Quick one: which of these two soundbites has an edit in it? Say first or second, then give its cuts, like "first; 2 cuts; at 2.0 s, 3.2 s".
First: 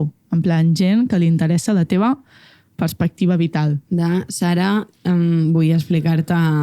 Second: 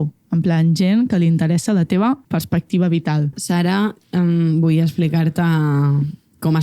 second; 2 cuts; at 2.2 s, 3.4 s